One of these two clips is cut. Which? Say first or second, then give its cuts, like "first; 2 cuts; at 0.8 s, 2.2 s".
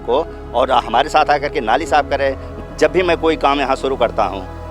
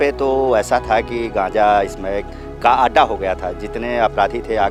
first; 1 cut; at 2.5 s